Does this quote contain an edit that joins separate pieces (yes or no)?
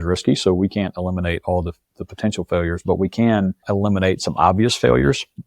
yes